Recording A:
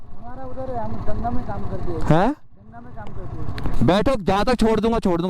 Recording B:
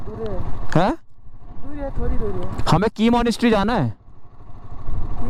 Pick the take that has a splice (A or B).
A